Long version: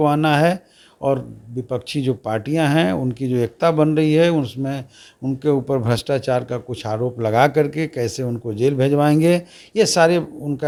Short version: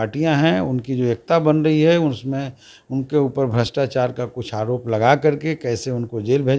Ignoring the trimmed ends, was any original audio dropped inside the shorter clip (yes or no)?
no